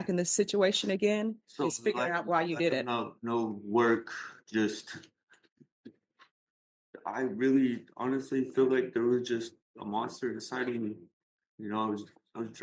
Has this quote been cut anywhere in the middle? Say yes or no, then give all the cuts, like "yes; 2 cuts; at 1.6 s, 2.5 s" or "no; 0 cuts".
no; 0 cuts